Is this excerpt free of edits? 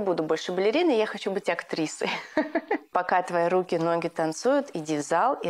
no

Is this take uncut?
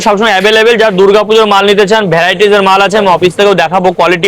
yes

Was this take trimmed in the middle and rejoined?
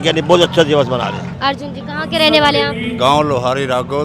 no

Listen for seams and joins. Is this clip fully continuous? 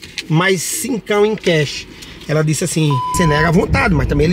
no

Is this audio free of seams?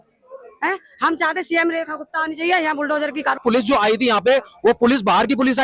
no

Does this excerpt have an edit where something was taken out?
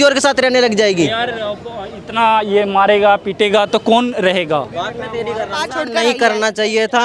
yes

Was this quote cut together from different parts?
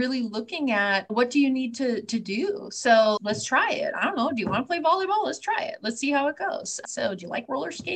yes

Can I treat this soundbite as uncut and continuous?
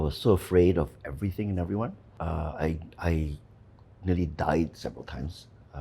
yes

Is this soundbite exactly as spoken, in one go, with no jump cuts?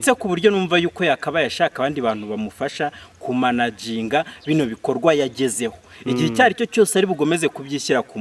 yes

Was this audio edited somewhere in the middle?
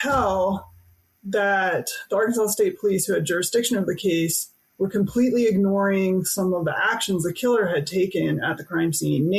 no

